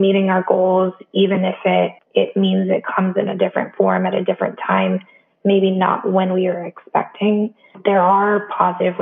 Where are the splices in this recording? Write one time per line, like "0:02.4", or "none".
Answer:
0:02.0
0:07.8